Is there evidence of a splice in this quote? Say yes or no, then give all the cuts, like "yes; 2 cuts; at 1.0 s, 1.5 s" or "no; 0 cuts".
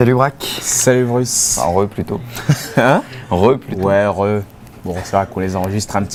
no; 0 cuts